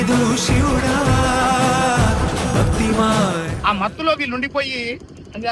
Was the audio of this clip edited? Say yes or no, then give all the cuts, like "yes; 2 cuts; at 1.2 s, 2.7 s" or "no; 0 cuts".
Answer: no; 0 cuts